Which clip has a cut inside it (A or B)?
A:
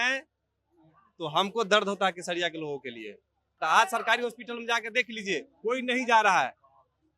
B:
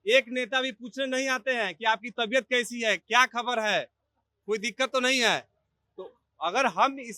A